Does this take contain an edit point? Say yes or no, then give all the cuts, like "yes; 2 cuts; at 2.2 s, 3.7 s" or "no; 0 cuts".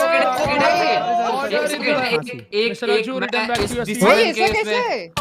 yes; 1 cut; at 2.0 s